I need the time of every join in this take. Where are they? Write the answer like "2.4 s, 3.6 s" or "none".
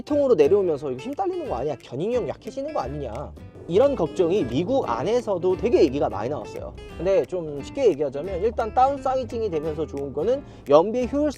none